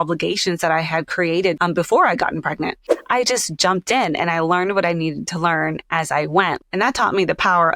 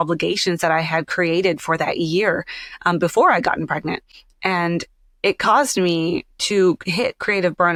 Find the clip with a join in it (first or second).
first